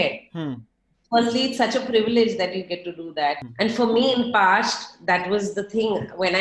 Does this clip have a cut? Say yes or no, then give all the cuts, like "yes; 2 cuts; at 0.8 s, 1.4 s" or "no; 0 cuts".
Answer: yes; 1 cut; at 3.4 s